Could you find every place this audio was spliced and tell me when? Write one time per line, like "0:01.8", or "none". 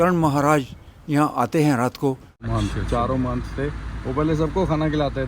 0:02.4